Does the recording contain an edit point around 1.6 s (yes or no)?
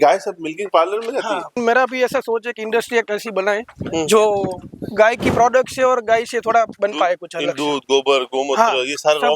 yes